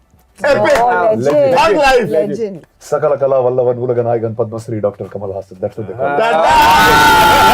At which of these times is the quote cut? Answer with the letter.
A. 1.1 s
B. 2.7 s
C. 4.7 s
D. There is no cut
B